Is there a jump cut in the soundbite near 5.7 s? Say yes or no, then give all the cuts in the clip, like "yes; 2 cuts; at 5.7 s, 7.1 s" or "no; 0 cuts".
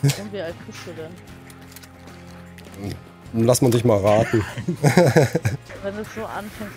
yes; 1 cut; at 5.7 s